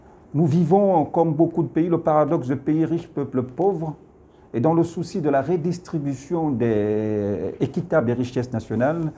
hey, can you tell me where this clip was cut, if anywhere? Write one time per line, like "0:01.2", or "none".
none